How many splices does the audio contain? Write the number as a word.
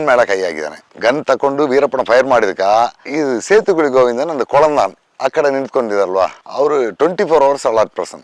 three